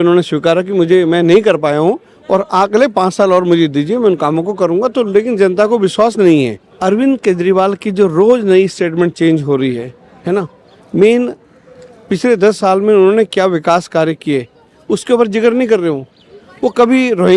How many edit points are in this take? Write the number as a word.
one